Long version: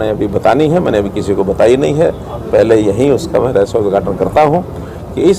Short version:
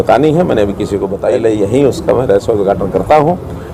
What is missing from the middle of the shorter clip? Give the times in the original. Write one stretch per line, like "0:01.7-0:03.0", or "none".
0:01.5-0:02.4